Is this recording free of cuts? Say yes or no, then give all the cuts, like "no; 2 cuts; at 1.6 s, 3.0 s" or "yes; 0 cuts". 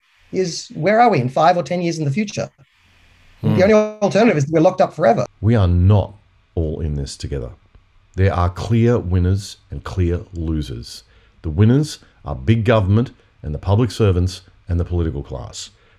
no; 1 cut; at 5.3 s